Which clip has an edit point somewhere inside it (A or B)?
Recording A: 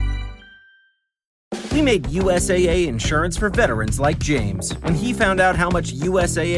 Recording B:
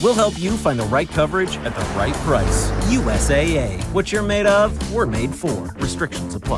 A